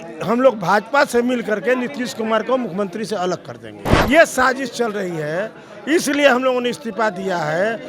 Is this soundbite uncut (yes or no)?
no